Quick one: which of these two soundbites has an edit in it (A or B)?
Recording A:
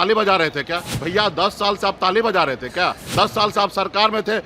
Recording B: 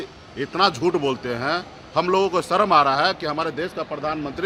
A